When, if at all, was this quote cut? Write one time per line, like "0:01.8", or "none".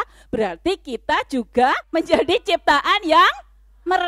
0:01.8

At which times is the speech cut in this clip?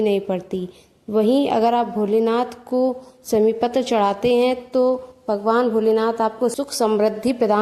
0:06.5

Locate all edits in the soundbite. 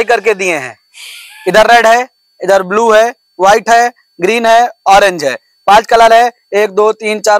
none

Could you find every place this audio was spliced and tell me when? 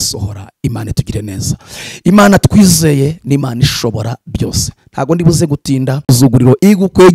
0:06.1

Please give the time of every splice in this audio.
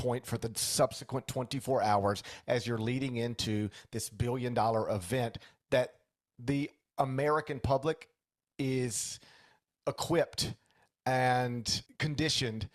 0:11.8

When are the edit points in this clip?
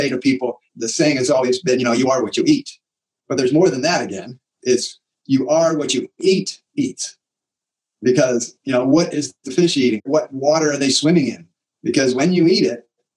0:10.0

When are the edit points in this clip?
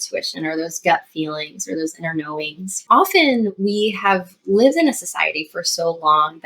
0:02.7

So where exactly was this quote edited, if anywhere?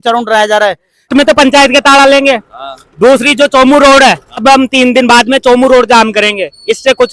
0:01.1
0:04.4

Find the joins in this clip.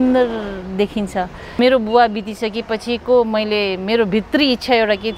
0:01.4

